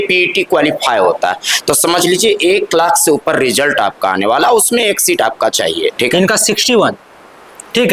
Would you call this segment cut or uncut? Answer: cut